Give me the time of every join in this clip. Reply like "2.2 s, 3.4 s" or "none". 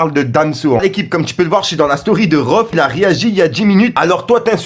0.8 s, 2.7 s, 3.9 s